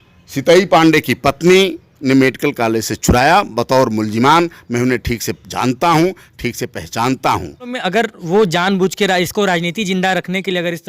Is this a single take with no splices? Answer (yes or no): no